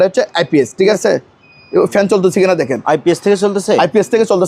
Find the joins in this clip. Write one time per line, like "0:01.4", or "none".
0:01.0